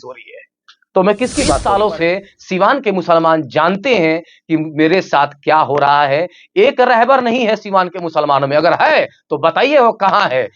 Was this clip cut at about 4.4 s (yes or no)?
no